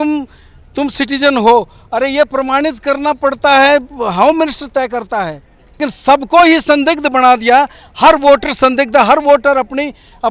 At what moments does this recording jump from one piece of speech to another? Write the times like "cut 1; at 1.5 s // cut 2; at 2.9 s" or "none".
cut 1; at 5.8 s